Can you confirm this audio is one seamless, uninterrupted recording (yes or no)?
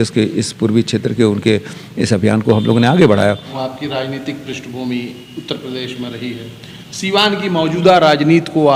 no